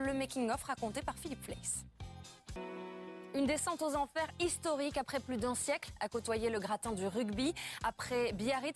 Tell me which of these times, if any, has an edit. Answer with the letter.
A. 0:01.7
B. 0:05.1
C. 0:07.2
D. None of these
A